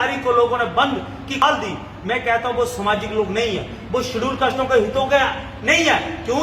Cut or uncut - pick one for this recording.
cut